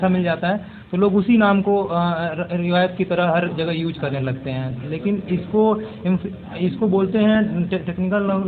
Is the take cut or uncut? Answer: uncut